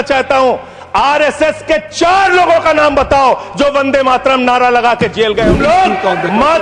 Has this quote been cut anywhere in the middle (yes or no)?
yes